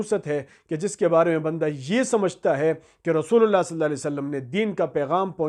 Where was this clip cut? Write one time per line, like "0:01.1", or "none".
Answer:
none